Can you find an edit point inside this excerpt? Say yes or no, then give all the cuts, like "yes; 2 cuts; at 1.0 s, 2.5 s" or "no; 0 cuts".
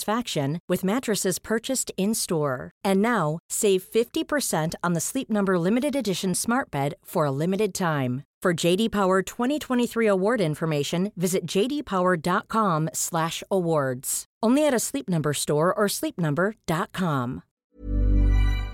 yes; 1 cut; at 17.5 s